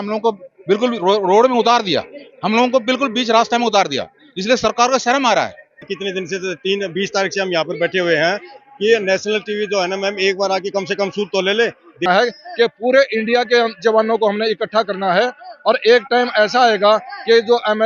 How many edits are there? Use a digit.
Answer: 2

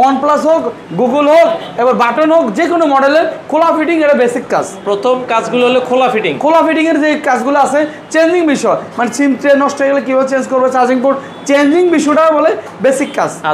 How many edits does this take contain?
0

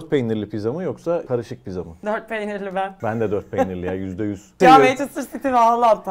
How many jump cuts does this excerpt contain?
3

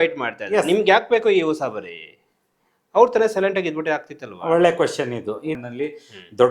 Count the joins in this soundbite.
1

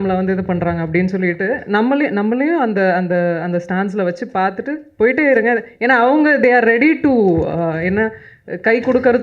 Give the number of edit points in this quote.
0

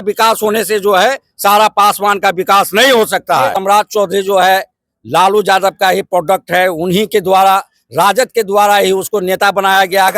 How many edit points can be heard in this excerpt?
1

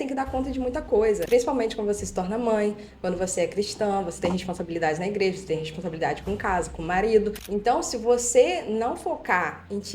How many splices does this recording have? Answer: 2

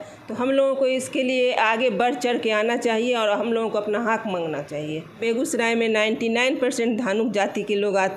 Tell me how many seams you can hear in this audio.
1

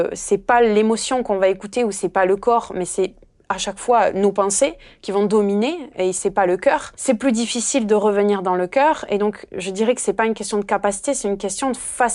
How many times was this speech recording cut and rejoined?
1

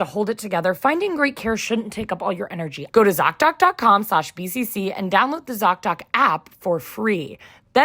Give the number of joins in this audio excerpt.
1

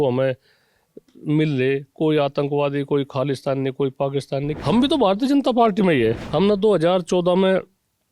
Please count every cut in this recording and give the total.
2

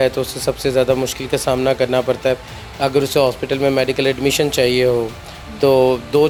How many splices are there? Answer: 0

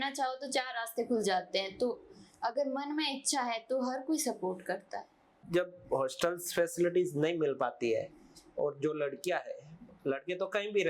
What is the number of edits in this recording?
1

